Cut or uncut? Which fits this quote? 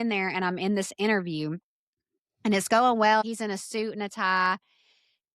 cut